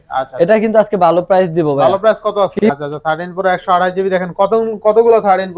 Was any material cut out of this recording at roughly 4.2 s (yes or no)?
no